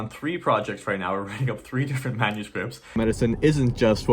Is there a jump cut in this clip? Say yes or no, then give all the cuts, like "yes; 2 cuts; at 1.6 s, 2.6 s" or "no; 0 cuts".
yes; 1 cut; at 3.0 s